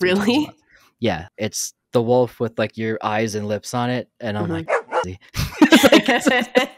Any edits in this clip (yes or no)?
yes